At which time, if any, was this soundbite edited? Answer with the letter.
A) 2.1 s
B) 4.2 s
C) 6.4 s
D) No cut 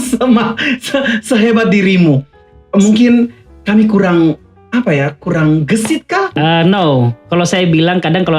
C